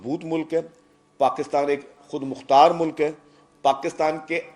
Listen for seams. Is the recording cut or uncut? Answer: uncut